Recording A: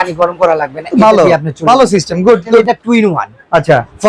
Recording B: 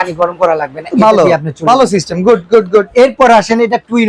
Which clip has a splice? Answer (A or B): A